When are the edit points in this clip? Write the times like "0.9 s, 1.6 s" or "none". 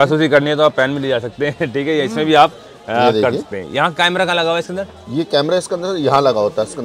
none